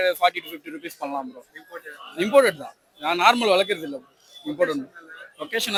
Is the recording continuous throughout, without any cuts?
yes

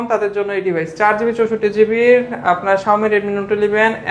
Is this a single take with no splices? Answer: yes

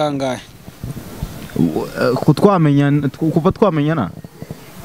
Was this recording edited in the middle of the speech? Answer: no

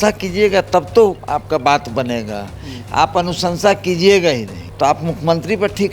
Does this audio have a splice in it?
yes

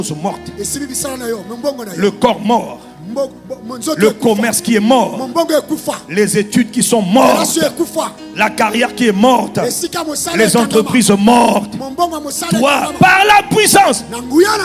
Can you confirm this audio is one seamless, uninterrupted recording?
yes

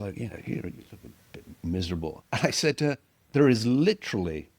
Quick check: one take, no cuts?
no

